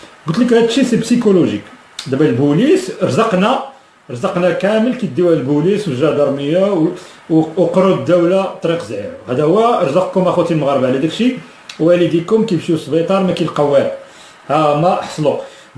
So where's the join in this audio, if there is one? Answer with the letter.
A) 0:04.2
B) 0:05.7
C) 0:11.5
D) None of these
A